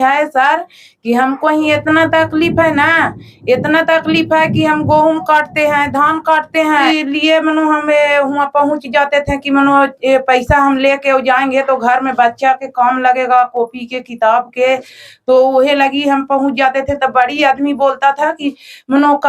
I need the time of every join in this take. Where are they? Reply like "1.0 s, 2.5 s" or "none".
6.9 s